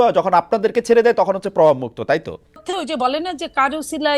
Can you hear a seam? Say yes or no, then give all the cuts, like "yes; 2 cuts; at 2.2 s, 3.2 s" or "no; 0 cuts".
yes; 1 cut; at 2.6 s